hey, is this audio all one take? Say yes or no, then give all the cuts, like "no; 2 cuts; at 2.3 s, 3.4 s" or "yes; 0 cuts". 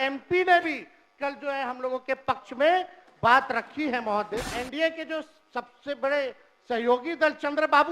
no; 1 cut; at 4.5 s